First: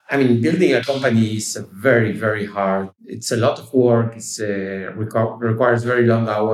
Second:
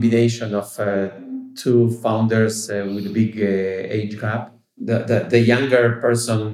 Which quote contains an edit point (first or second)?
second